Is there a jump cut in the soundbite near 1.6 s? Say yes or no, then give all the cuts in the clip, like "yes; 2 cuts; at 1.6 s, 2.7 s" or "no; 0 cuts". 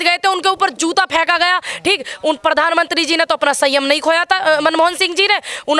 no; 0 cuts